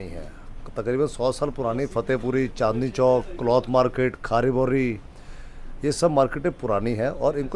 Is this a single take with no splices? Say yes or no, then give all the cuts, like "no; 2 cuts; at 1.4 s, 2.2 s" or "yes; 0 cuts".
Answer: yes; 0 cuts